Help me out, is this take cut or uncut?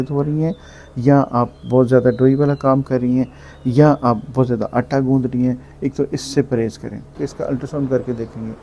cut